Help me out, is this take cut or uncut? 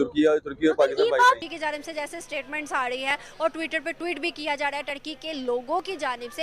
cut